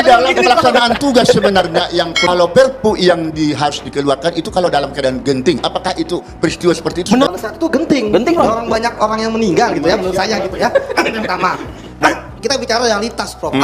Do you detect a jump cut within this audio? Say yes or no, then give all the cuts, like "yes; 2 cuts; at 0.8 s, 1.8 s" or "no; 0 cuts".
yes; 3 cuts; at 2.3 s, 7.3 s, 12.0 s